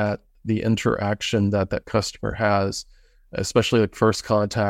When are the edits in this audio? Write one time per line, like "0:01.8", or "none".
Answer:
none